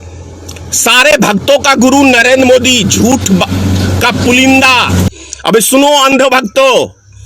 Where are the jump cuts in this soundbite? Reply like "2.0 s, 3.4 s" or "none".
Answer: 5.1 s

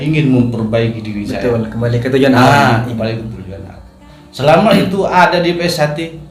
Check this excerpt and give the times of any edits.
none

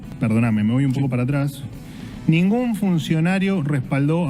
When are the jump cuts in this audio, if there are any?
none

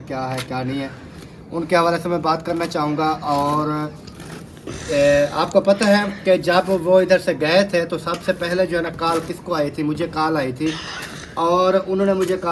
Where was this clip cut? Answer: none

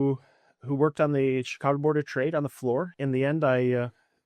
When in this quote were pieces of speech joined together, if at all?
2.9 s

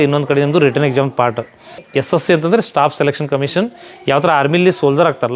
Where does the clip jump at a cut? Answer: 1.8 s

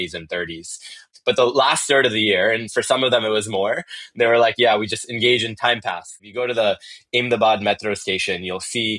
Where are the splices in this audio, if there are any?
6.2 s

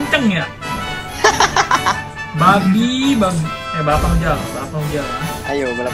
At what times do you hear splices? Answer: 3.6 s

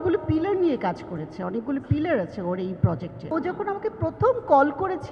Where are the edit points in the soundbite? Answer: 3.2 s

